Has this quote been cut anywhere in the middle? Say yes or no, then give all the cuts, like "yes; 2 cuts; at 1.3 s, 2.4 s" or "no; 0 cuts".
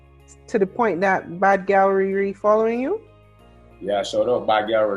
no; 0 cuts